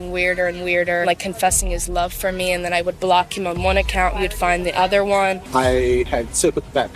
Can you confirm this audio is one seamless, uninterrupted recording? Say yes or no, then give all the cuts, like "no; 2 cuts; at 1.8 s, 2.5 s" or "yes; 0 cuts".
no; 3 cuts; at 1.0 s, 5.4 s, 6.1 s